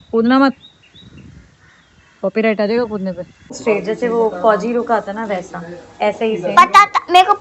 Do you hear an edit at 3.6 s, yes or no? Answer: yes